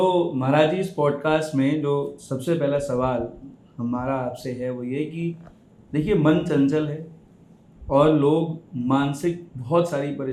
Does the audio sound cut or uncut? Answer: uncut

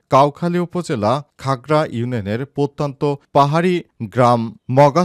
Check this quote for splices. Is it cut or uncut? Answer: uncut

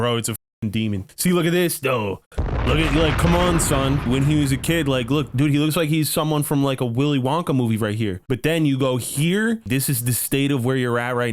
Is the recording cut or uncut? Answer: cut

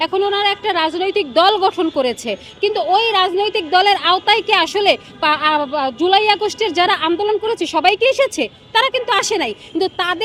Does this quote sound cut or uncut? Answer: uncut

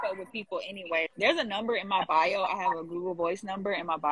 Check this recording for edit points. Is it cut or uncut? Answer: cut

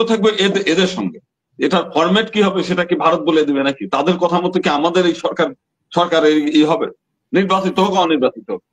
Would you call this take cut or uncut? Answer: uncut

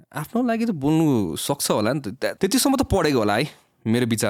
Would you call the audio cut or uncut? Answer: cut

